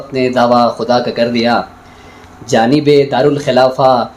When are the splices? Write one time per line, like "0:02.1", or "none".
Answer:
none